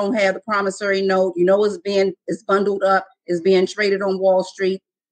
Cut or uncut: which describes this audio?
uncut